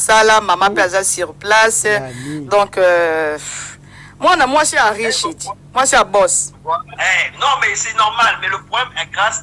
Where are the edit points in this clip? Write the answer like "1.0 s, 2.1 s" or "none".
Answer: 6.9 s